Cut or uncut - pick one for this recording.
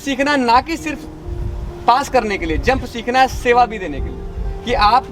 uncut